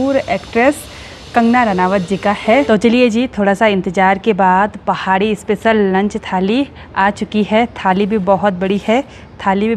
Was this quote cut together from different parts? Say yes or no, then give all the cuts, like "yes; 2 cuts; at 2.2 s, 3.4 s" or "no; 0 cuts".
yes; 1 cut; at 2.7 s